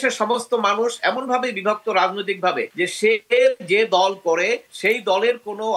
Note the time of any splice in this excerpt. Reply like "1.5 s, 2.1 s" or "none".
2.7 s, 4.7 s